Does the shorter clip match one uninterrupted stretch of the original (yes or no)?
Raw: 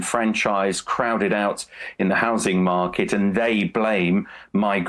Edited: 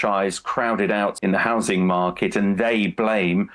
no